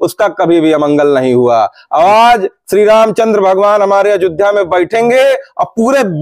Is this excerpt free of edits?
yes; 0 cuts

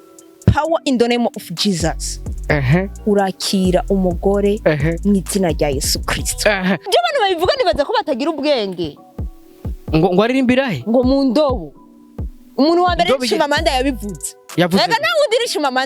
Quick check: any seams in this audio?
yes; 1 cut; at 6.9 s

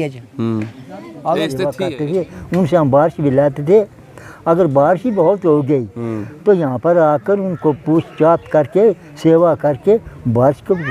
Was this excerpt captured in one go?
no; 1 cut; at 1.8 s

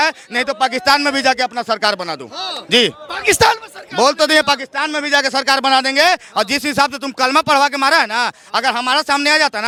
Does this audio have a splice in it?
no; 0 cuts

